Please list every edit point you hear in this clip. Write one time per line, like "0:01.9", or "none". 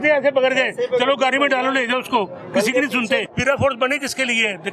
0:03.2